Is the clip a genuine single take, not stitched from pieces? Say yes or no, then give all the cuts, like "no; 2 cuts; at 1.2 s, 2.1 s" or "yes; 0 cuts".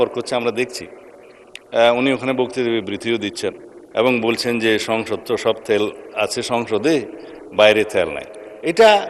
yes; 0 cuts